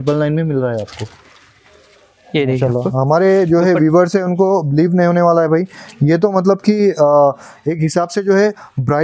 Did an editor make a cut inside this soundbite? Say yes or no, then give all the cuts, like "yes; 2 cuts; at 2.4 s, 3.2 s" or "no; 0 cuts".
no; 0 cuts